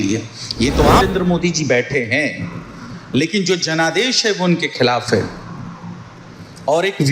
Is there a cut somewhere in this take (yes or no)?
yes